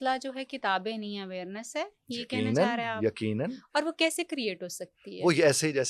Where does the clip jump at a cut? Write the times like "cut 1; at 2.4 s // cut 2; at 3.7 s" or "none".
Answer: none